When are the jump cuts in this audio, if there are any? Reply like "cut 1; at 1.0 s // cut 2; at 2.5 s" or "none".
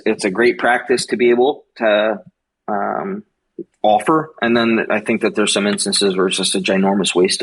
none

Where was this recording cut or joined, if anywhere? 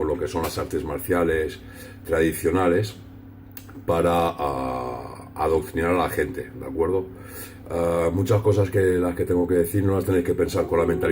cut 1; at 4.8 s

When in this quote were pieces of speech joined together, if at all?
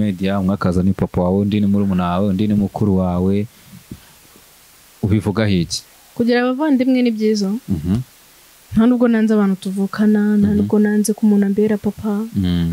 none

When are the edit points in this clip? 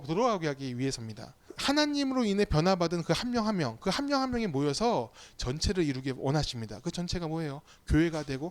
cut 1; at 1.5 s

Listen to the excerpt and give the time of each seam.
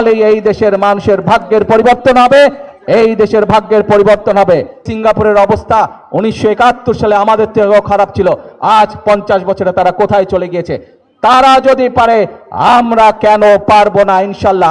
cut 1; at 4.9 s

